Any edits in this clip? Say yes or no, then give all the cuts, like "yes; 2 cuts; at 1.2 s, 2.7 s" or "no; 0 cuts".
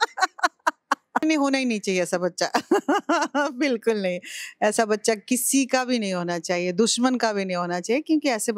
yes; 1 cut; at 1.2 s